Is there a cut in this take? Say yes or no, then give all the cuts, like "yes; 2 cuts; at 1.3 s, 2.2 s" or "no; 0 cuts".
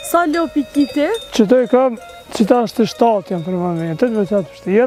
no; 0 cuts